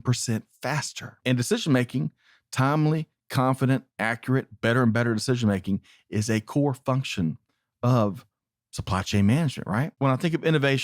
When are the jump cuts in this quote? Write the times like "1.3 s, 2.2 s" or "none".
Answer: 1.2 s, 9.9 s